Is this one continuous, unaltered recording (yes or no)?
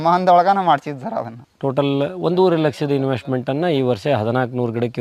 no